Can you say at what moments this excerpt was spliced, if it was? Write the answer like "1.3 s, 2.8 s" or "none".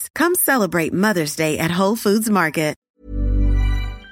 2.9 s